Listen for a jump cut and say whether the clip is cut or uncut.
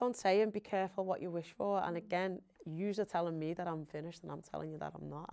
cut